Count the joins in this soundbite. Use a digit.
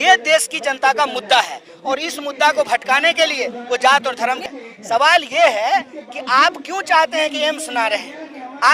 1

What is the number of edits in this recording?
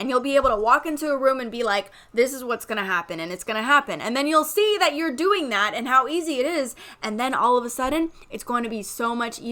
0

